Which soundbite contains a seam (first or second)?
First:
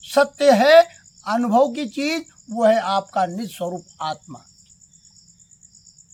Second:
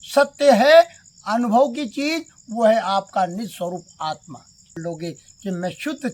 second